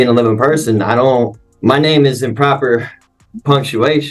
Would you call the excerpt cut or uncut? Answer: cut